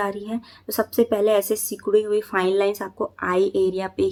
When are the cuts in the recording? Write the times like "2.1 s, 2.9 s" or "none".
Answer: none